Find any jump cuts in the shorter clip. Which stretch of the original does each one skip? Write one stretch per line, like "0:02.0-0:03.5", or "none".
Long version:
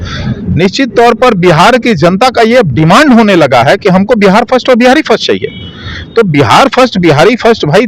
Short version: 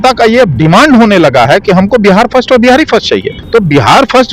0:05.5-0:06.0